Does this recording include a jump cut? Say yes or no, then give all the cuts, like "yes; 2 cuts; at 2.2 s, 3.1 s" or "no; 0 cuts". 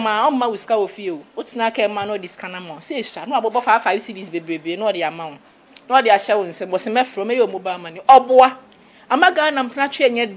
no; 0 cuts